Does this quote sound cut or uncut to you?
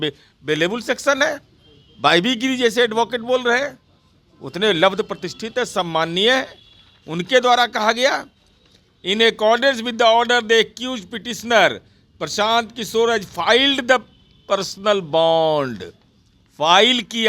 uncut